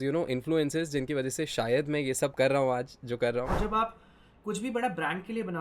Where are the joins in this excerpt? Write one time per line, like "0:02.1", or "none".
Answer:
0:03.5